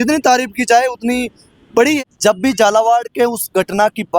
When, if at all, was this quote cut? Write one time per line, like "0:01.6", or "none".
0:02.0

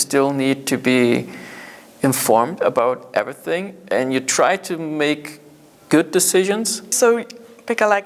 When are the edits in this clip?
0:06.9

